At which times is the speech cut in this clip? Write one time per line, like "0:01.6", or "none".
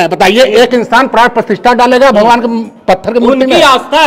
none

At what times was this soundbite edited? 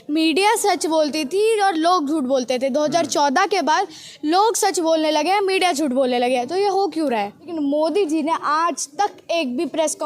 0:07.4

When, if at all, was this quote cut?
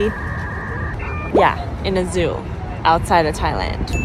none

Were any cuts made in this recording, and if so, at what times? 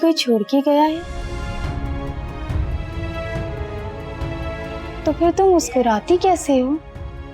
0:01.2
0:04.9

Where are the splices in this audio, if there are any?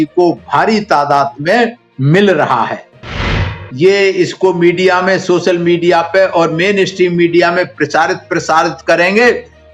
0:03.3

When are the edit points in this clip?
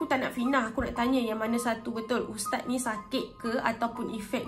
none

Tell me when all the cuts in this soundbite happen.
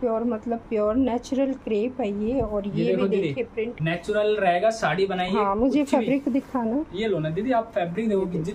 none

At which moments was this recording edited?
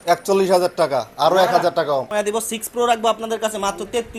0:02.1

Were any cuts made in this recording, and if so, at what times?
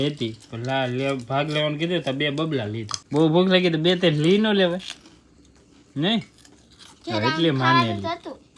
0:02.9

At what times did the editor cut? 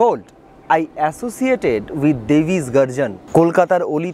0:03.2

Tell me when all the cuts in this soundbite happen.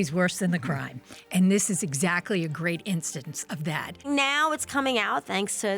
0:04.1

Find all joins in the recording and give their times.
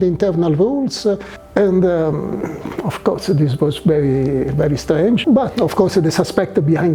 0:01.3
0:05.2

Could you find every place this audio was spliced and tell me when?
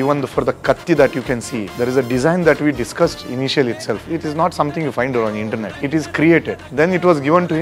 0:01.7
0:04.0
0:05.8
0:06.6

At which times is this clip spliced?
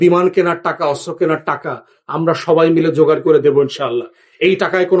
none

